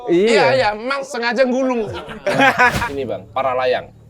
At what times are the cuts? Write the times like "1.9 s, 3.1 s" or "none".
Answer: 1.1 s, 2.1 s, 2.8 s